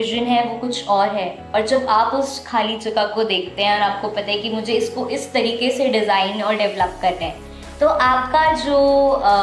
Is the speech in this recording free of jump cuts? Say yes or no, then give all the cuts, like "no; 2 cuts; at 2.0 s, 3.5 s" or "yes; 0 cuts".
yes; 0 cuts